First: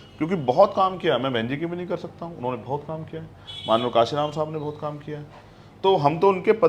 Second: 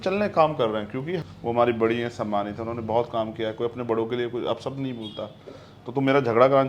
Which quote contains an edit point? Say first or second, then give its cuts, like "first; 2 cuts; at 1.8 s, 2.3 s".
second; 1 cut; at 1.2 s